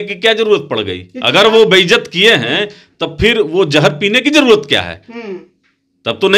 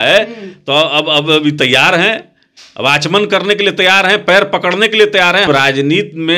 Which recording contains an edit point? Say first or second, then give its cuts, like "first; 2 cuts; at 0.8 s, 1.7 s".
second; 1 cut; at 5.5 s